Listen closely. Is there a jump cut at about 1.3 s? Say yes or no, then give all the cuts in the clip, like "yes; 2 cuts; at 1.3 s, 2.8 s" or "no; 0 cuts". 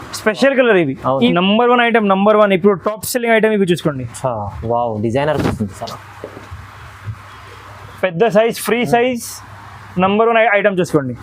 yes; 1 cut; at 1.3 s